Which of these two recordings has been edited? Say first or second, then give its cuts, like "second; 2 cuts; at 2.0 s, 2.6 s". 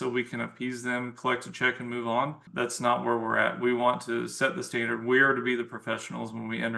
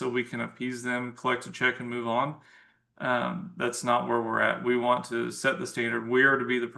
first; 1 cut; at 2.4 s